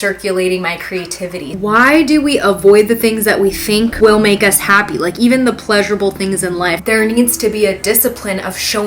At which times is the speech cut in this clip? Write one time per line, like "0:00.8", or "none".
0:01.5
0:03.9
0:06.8